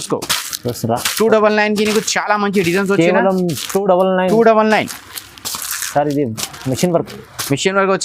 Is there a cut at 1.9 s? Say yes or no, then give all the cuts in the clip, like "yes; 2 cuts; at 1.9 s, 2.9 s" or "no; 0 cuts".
no; 0 cuts